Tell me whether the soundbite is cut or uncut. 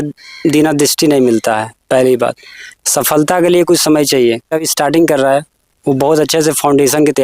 cut